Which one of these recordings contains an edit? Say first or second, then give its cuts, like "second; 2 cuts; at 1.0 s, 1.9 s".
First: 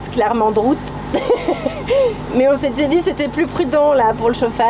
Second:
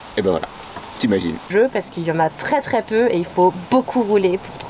second; 1 cut; at 1.5 s